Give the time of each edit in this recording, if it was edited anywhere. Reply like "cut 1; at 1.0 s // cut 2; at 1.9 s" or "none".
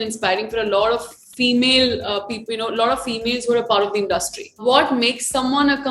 cut 1; at 4.6 s